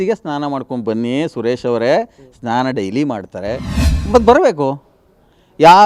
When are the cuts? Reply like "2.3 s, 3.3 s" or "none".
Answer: 3.9 s